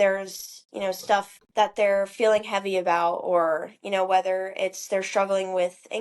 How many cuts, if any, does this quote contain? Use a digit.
1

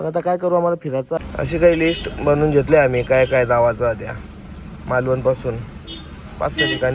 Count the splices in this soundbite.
1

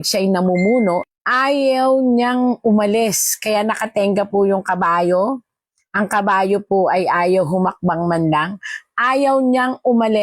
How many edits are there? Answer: 1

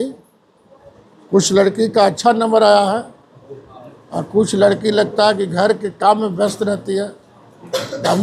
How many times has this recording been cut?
0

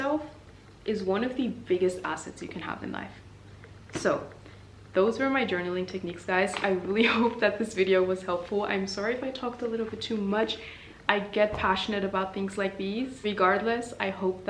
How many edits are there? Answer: 0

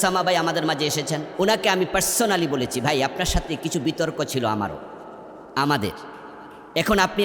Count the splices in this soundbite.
1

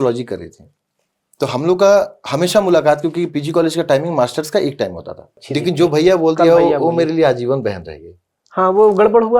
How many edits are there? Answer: 1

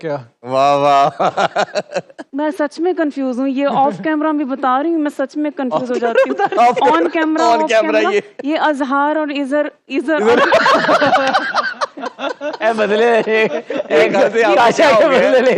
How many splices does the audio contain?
1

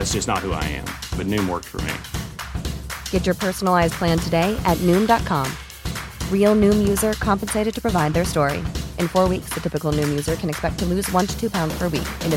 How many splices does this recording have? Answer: 0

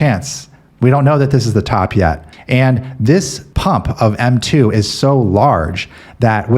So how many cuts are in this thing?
1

